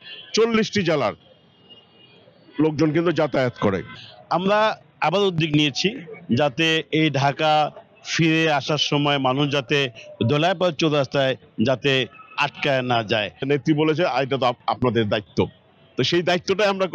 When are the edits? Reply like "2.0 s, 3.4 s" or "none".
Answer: 3.9 s, 13.4 s